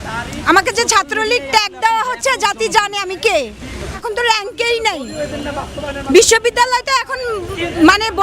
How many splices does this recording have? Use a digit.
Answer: 1